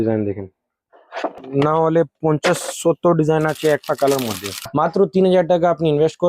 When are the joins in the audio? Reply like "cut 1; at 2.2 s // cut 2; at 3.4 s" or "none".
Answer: cut 1; at 1.4 s // cut 2; at 4.7 s